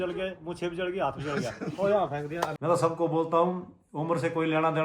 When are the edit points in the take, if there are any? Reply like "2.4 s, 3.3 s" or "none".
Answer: 2.6 s

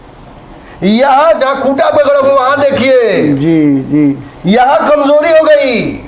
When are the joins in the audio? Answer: none

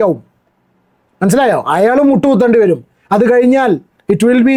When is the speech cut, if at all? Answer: none

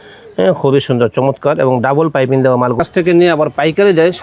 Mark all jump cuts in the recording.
2.8 s

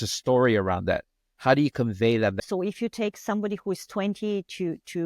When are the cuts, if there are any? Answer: 2.4 s

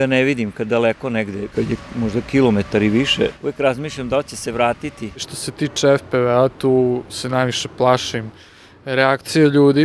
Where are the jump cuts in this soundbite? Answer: 1.4 s, 3.4 s, 5.4 s

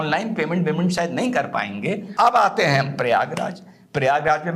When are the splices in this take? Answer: 2.1 s

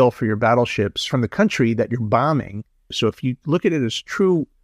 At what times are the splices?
1.0 s, 3.0 s

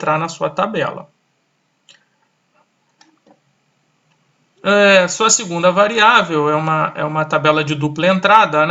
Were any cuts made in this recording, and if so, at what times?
none

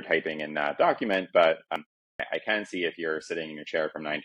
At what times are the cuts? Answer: 1.8 s

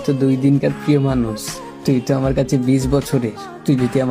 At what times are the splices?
none

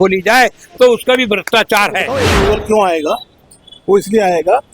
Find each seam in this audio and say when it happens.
2.2 s

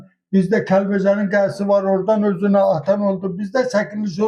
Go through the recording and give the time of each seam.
none

